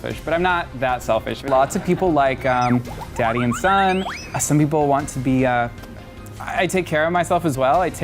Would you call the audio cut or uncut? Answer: cut